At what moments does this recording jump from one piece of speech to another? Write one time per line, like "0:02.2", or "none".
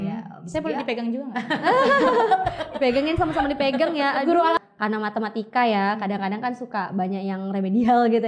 0:04.6